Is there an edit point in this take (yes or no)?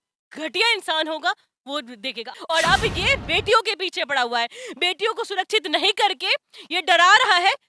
yes